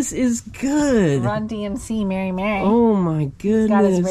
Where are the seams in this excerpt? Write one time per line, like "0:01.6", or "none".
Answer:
none